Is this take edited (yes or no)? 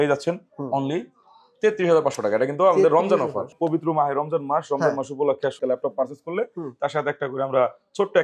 yes